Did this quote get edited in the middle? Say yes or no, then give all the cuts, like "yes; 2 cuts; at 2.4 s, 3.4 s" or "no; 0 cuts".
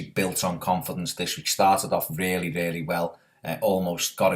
yes; 1 cut; at 2.4 s